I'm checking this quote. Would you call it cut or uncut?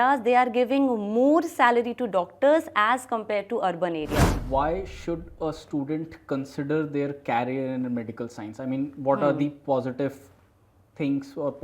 cut